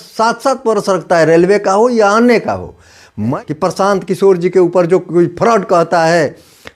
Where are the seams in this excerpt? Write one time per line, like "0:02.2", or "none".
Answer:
0:03.3